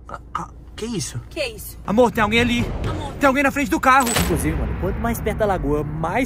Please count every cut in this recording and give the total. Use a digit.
1